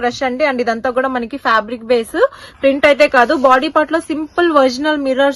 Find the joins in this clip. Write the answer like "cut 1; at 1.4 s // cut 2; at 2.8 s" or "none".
none